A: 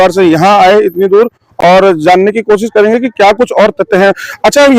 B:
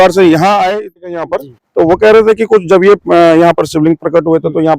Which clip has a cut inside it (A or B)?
B